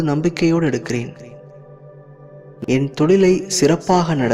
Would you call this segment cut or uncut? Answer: uncut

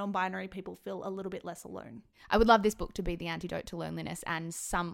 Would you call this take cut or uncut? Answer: cut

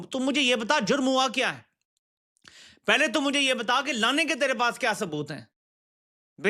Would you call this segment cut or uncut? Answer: uncut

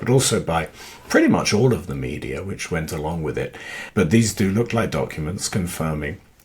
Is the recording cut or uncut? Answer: cut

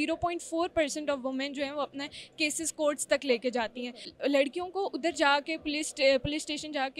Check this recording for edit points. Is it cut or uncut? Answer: cut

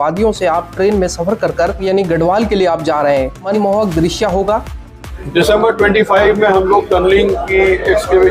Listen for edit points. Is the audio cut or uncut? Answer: cut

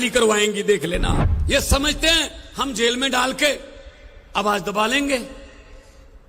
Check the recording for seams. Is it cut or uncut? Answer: cut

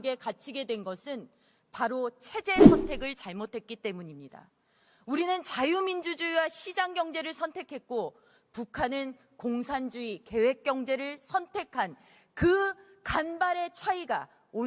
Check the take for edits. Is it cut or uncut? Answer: uncut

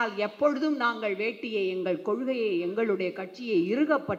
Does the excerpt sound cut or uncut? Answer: uncut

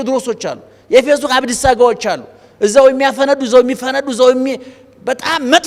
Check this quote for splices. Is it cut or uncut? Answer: uncut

